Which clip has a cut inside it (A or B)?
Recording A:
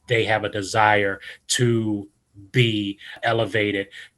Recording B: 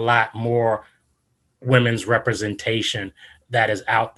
A